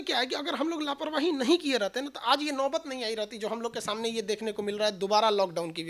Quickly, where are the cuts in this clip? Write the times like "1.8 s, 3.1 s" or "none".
none